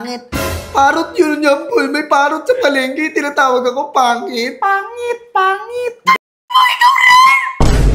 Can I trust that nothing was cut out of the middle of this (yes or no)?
yes